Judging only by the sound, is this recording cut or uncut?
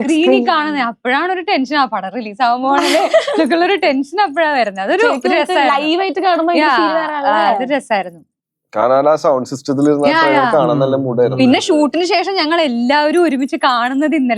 uncut